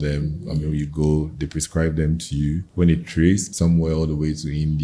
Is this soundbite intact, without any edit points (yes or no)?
no